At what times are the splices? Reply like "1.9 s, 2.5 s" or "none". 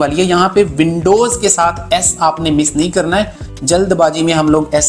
none